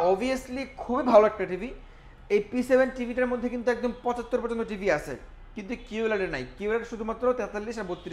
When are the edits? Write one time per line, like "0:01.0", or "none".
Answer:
none